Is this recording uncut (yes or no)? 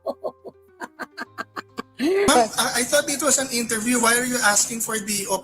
no